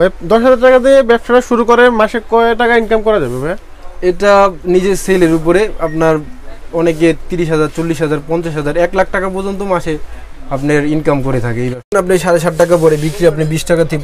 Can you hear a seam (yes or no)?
yes